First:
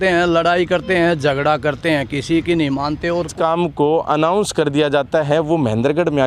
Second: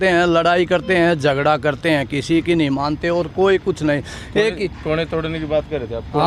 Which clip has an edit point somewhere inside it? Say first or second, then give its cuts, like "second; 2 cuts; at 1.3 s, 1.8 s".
first; 1 cut; at 3.3 s